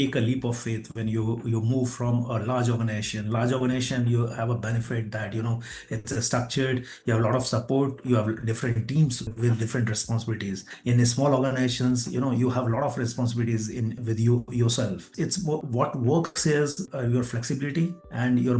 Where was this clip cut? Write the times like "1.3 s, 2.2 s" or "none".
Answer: 15.1 s

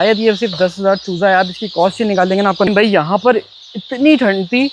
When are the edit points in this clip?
2.7 s

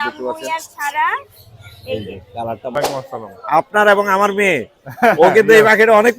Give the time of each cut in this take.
2.7 s

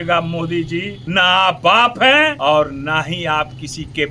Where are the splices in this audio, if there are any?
1.3 s, 2.4 s

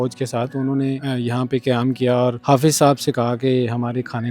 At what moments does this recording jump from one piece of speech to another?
0.9 s, 2.4 s

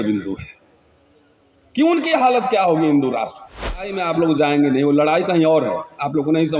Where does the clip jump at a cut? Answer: 4.0 s

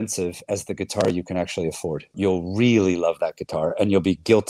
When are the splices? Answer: 2.1 s

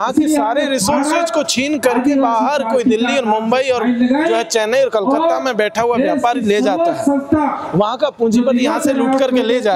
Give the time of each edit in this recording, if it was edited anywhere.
none

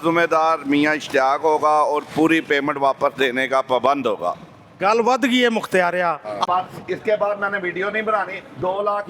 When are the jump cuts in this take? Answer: 6.4 s

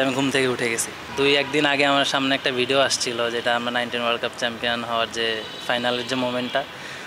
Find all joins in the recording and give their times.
1.1 s

